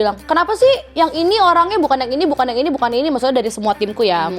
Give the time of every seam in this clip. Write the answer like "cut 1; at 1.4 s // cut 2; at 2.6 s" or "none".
none